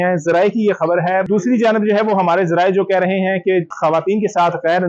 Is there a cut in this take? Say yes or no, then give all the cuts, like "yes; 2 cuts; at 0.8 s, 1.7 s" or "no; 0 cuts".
yes; 2 cuts; at 1.3 s, 3.7 s